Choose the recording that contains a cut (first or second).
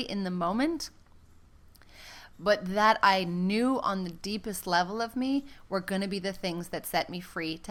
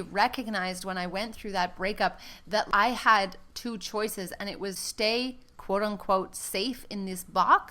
second